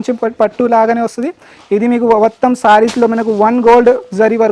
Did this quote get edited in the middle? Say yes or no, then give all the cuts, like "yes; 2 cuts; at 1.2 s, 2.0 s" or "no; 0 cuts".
no; 0 cuts